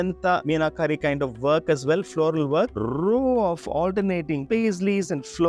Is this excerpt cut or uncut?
cut